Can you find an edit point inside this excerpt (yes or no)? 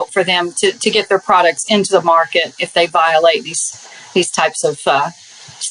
no